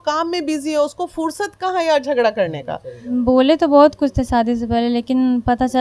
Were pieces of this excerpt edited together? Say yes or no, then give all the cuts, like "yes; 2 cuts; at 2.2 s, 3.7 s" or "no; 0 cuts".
yes; 1 cut; at 3.0 s